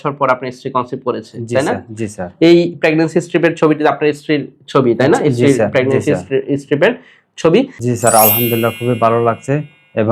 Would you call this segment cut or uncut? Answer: cut